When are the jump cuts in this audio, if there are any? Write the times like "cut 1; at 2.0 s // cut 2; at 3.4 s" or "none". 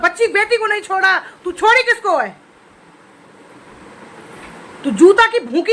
none